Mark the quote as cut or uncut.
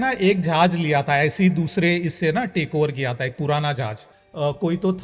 cut